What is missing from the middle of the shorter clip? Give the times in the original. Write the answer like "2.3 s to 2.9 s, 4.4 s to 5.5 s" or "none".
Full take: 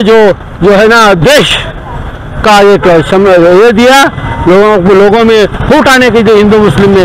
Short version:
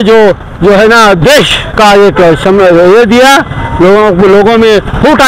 1.6 s to 2.3 s